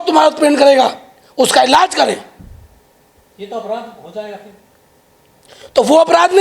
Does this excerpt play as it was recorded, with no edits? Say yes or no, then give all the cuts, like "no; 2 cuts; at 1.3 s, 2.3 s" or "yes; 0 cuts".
yes; 0 cuts